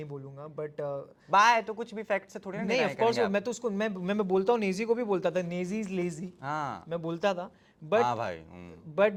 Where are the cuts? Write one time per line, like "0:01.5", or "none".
none